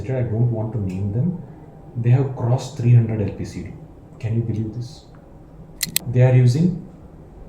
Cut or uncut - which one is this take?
cut